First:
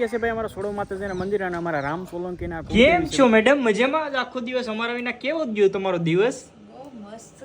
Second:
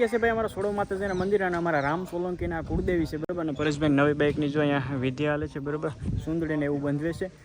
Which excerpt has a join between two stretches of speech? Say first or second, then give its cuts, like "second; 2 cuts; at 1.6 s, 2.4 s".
first; 1 cut; at 2.6 s